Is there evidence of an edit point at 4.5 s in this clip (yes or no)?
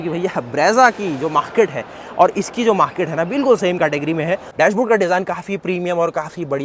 yes